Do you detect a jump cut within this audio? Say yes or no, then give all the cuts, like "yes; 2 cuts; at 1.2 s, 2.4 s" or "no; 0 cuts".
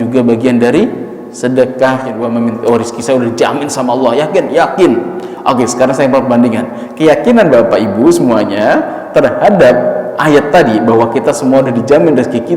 yes; 1 cut; at 2.2 s